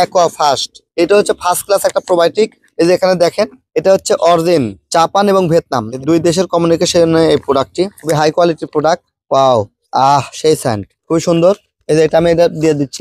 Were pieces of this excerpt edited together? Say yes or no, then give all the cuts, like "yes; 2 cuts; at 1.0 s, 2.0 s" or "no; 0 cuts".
no; 0 cuts